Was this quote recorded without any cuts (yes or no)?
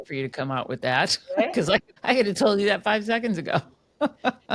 no